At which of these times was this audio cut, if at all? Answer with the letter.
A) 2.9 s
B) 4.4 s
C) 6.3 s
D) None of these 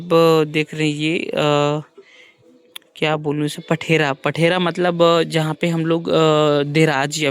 D